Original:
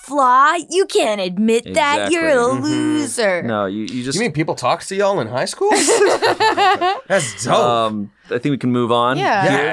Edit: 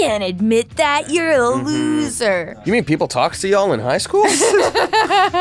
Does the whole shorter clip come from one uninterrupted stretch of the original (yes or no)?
no